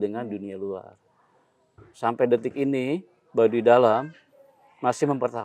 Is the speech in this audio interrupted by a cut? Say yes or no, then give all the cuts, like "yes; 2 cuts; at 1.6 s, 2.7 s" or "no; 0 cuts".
no; 0 cuts